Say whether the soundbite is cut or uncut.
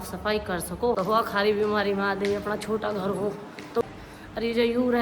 cut